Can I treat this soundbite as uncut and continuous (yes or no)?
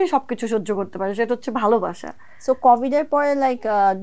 yes